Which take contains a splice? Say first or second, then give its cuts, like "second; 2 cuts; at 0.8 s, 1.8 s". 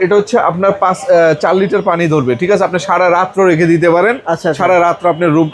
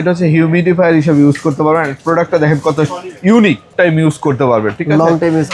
second; 1 cut; at 3.7 s